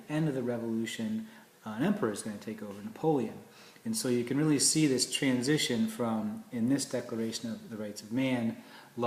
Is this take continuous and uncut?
yes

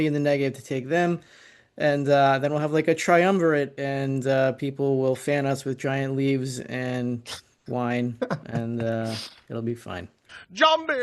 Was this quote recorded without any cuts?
yes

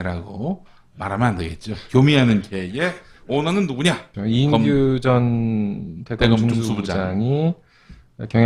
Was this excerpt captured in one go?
no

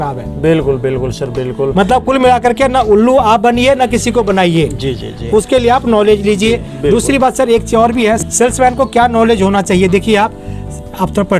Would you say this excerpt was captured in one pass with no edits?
yes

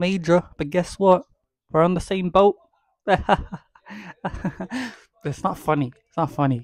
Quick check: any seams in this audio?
no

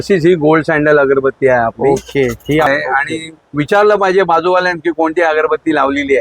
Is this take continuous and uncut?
no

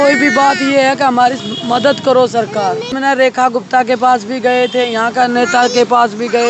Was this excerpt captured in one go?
no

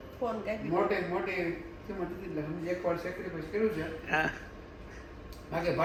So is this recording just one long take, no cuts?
yes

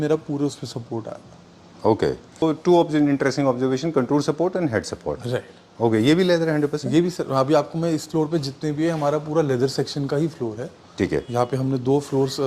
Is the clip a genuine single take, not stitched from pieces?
no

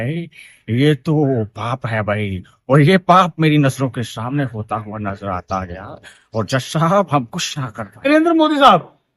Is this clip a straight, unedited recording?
no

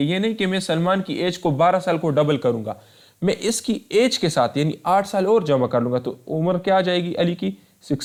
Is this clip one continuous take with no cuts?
yes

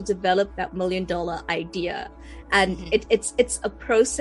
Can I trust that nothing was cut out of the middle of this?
yes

